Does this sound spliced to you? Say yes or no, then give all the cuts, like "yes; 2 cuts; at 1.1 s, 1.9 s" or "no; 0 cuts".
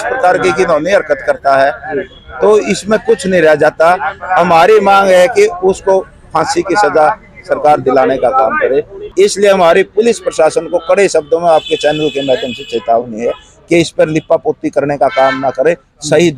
yes; 1 cut; at 9.0 s